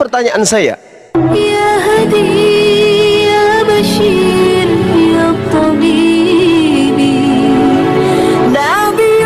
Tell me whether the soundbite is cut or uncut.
cut